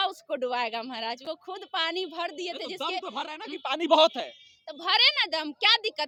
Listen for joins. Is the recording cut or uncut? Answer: uncut